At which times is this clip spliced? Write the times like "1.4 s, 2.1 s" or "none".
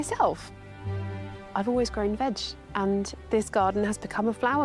3.2 s